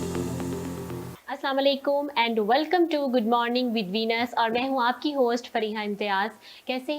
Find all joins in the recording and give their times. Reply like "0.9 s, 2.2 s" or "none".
1.1 s